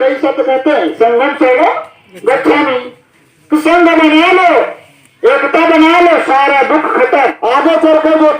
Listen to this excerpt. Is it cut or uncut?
cut